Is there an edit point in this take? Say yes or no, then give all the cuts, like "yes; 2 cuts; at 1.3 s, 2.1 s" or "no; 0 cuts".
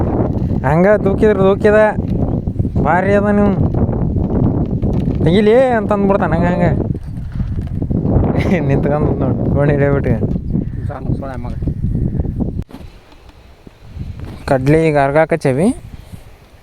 yes; 1 cut; at 12.6 s